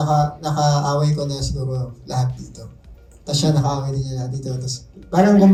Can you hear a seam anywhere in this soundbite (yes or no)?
no